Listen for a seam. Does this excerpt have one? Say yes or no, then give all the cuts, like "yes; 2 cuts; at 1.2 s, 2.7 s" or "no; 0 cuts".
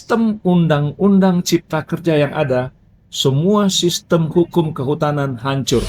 no; 0 cuts